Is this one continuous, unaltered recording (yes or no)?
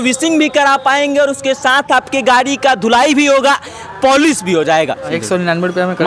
no